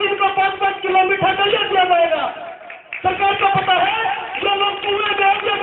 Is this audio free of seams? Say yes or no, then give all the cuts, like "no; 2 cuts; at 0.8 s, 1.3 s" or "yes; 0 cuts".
yes; 0 cuts